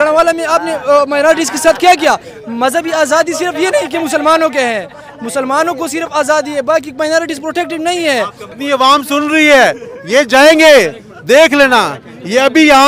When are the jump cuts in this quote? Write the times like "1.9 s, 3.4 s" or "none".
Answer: 8.6 s